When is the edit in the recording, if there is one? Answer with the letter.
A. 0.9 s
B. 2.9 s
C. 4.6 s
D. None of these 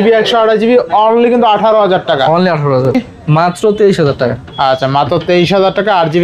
B